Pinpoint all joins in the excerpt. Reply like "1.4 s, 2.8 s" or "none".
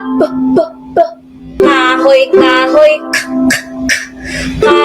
1.6 s